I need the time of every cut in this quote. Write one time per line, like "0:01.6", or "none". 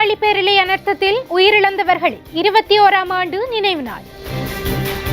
0:04.2

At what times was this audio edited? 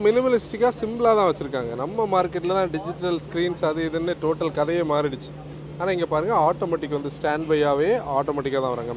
none

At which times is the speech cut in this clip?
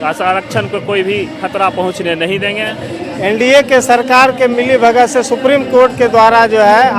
0:02.8

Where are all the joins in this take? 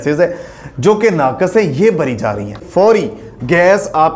0:02.6

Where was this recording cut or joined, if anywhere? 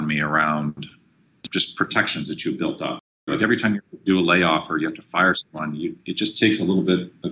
0:03.3

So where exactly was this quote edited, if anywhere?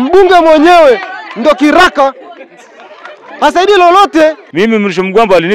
0:04.4

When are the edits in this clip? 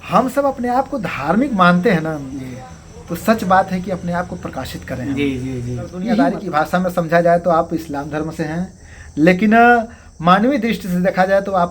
0:06.4

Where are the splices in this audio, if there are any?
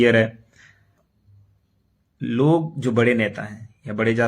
0:00.9

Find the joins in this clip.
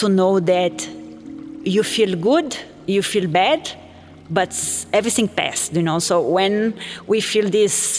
none

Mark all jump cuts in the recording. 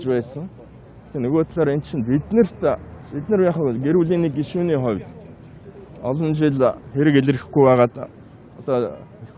none

